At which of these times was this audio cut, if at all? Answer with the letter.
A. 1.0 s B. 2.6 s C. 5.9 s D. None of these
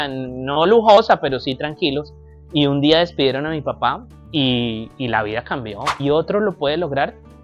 C